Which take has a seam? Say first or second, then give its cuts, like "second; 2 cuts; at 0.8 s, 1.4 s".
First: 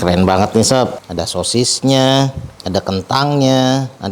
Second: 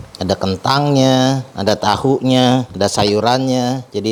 first; 1 cut; at 0.9 s